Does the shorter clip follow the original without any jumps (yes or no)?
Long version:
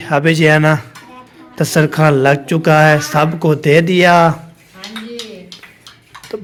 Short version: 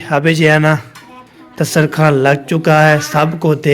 yes